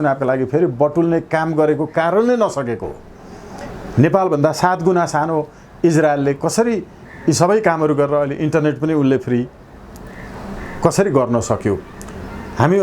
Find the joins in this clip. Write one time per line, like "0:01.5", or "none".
none